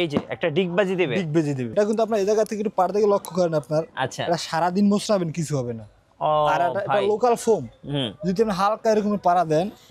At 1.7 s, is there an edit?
yes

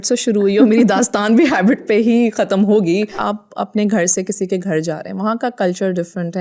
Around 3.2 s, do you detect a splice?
yes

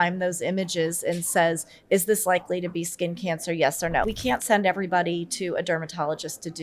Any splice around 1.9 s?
no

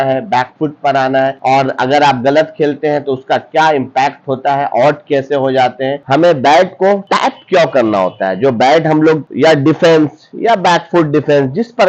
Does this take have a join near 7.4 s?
no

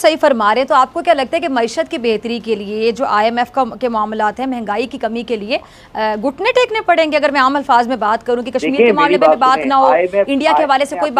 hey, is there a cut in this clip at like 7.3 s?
no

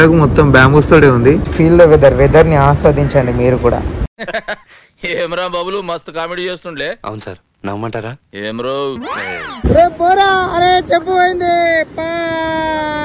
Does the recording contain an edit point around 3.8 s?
no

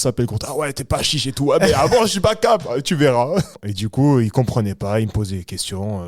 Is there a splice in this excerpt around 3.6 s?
yes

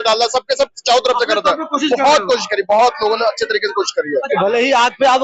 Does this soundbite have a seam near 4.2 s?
yes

